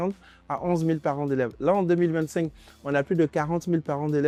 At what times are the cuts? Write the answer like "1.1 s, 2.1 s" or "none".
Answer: none